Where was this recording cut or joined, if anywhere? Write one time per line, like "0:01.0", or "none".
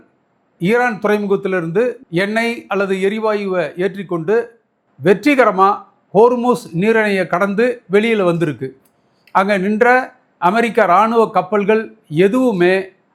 none